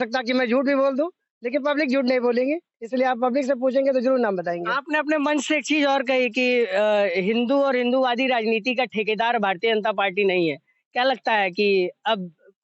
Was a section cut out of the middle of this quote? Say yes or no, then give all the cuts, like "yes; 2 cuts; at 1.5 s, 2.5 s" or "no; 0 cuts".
no; 0 cuts